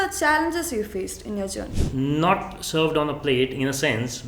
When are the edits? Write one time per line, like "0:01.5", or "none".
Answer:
0:01.7